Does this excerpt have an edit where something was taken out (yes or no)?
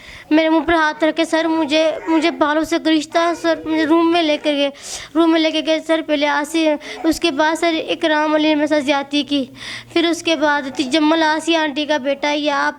no